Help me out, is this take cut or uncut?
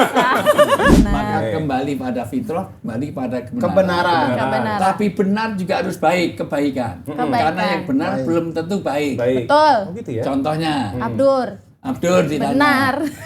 cut